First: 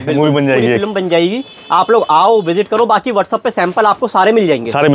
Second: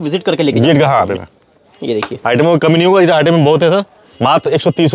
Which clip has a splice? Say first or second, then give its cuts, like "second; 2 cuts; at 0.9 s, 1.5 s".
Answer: second; 2 cuts; at 1.1 s, 4.0 s